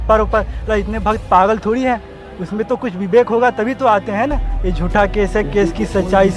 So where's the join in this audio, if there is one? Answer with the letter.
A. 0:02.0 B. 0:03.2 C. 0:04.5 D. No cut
C